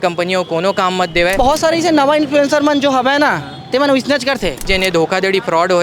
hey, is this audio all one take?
no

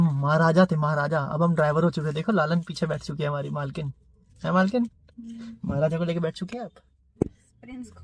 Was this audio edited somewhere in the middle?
no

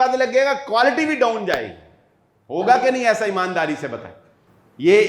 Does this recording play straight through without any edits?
yes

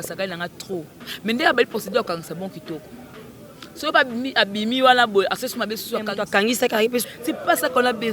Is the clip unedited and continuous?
no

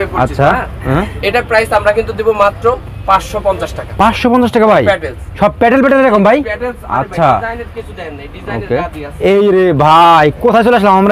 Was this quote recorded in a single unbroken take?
yes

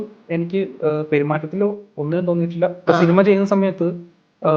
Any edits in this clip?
yes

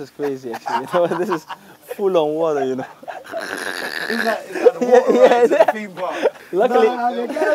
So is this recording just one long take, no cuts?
no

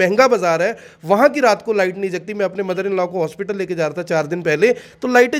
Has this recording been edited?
no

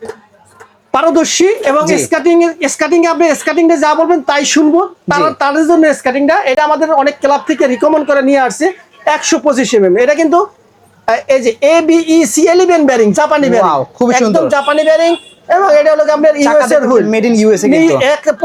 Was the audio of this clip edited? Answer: no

